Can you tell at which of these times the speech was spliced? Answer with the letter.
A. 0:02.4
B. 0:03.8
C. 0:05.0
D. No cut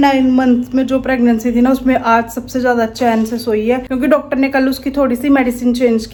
D